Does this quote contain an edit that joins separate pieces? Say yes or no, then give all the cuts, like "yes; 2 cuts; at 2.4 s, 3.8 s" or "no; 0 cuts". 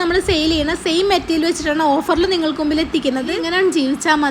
yes; 1 cut; at 3.4 s